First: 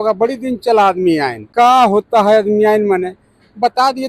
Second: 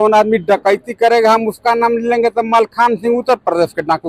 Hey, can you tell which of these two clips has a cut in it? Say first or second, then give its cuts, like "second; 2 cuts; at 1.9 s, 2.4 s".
first; 1 cut; at 1.5 s